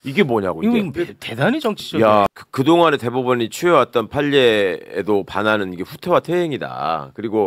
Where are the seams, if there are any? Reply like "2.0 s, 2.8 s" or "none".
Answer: 2.3 s